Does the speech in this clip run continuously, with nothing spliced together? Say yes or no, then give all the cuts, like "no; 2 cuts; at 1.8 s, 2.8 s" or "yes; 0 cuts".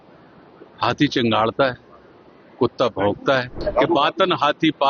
no; 1 cut; at 3.6 s